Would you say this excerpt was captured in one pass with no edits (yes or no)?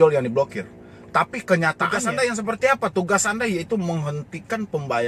no